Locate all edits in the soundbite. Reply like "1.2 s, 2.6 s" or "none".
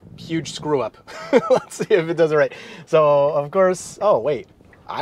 none

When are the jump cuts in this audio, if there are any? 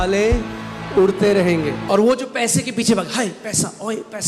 1.8 s

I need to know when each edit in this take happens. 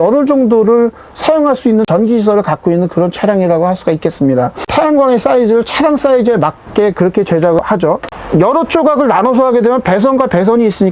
none

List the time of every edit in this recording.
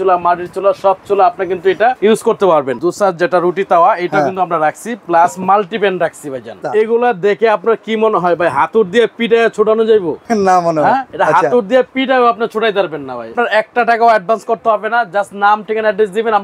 2.0 s, 2.8 s, 6.6 s, 10.2 s, 11.1 s, 13.3 s

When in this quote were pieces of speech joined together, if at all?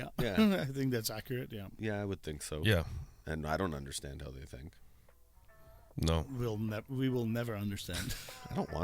1.6 s

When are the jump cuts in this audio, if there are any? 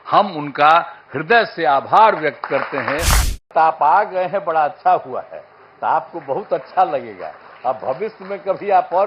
3.5 s

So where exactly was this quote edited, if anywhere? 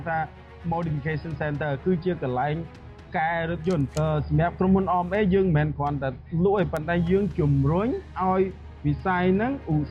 3.9 s

